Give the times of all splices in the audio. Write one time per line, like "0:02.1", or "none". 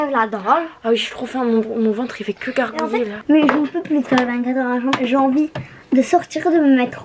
0:03.2